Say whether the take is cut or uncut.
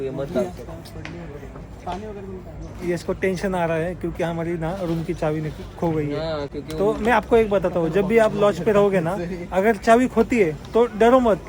uncut